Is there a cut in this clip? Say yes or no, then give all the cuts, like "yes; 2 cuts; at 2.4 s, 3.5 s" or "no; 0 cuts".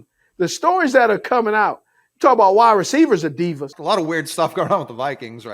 yes; 1 cut; at 3.7 s